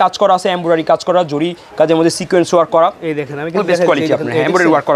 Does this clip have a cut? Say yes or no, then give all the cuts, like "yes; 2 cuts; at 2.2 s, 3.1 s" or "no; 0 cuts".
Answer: no; 0 cuts